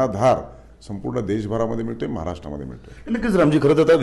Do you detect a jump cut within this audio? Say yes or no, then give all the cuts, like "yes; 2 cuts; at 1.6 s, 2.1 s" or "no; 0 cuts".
no; 0 cuts